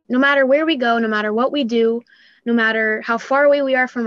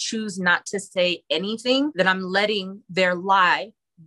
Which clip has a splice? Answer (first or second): second